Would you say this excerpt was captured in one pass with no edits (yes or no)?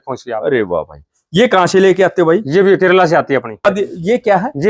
no